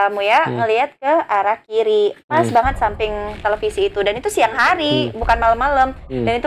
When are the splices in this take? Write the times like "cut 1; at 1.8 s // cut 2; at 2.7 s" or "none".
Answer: none